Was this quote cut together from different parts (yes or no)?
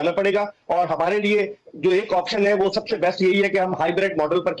no